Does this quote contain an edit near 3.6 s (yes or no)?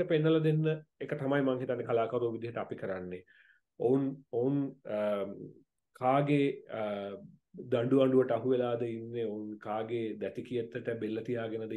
no